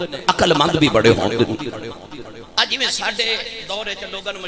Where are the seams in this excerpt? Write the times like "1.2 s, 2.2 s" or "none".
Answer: none